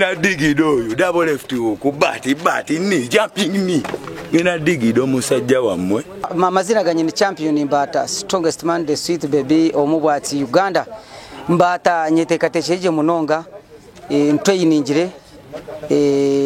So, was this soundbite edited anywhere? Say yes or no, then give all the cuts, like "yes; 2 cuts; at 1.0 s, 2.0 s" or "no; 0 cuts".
yes; 1 cut; at 6.3 s